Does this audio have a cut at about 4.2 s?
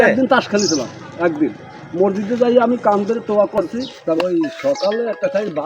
yes; 1 cut; at 4.2 s

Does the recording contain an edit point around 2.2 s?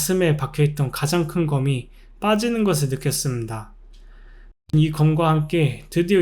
no; 1 cut; at 4.6 s

